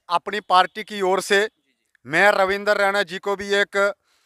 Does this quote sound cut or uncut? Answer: uncut